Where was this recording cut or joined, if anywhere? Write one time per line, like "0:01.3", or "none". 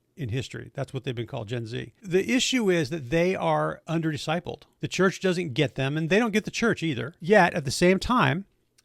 0:01.9
0:03.8
0:04.7
0:07.1